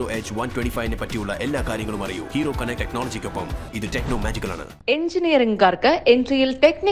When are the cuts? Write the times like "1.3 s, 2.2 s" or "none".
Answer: none